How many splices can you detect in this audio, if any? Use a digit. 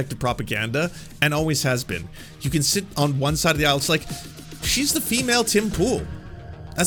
0